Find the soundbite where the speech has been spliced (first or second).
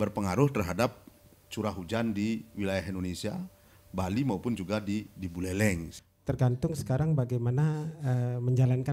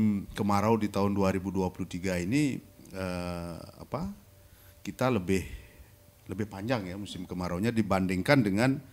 first